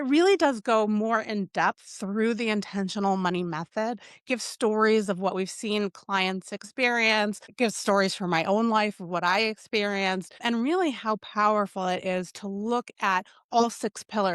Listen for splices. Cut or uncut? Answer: cut